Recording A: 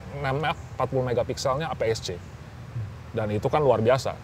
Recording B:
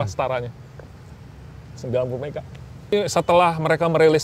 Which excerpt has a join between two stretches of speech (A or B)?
B